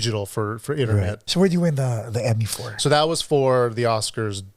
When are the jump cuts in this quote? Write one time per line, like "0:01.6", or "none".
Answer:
0:01.2